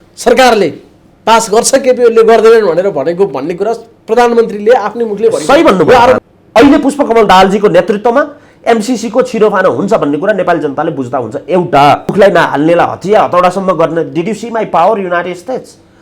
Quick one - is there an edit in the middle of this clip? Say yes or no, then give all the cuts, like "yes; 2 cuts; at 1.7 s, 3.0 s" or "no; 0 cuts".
yes; 2 cuts; at 6.2 s, 12.1 s